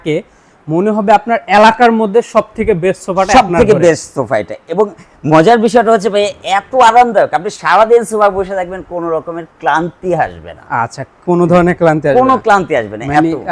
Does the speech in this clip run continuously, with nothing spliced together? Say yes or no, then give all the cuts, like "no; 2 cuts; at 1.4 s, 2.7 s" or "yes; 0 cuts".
yes; 0 cuts